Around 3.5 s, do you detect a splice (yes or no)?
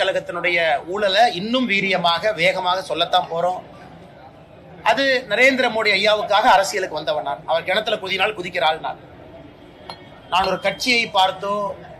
no